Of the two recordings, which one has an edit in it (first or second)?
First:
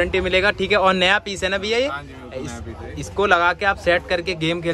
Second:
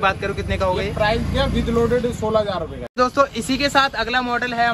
second